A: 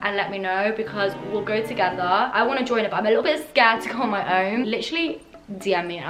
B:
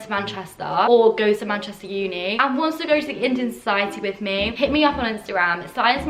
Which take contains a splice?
B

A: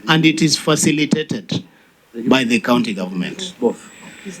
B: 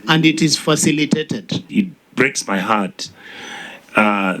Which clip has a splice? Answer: B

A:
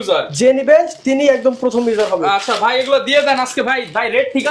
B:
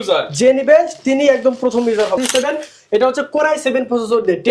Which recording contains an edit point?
B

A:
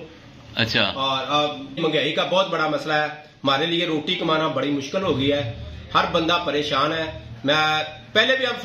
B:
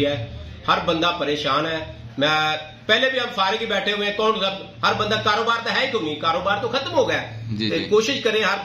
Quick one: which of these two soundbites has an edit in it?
A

